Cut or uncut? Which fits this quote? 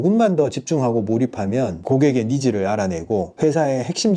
cut